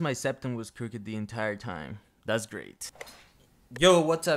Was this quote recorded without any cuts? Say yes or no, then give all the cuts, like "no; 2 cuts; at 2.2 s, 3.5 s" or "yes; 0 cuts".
yes; 0 cuts